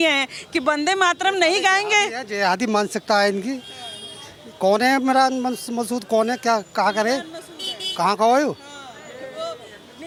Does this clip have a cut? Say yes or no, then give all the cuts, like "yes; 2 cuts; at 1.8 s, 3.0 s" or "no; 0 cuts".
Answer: no; 0 cuts